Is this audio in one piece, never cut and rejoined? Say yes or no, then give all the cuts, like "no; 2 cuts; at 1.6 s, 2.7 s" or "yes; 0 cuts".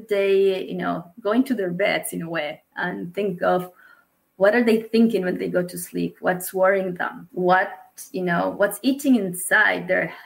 yes; 0 cuts